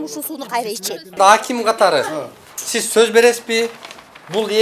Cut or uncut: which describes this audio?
cut